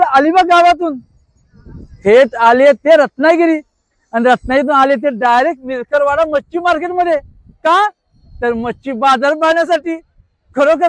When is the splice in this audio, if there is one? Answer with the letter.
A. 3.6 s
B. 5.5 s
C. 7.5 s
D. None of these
D